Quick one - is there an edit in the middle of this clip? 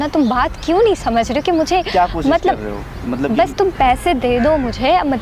no; 0 cuts

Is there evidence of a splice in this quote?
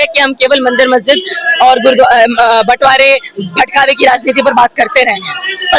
no; 0 cuts

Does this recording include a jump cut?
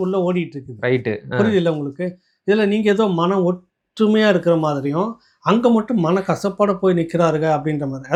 no; 0 cuts

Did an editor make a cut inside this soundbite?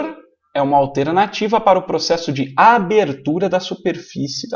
no; 0 cuts

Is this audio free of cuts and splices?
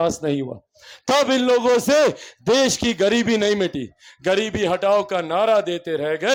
yes; 0 cuts

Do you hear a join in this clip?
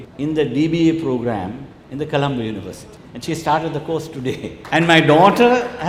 no; 0 cuts

